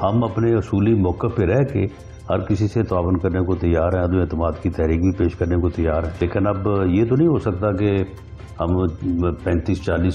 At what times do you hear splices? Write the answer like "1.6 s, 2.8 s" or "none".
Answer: 6.2 s